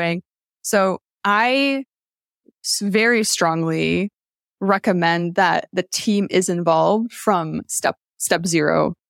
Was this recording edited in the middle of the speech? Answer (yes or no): no